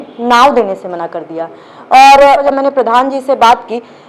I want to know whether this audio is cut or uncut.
cut